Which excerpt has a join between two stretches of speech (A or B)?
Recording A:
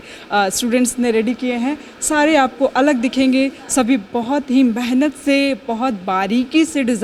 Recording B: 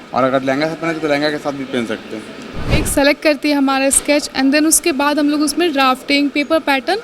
B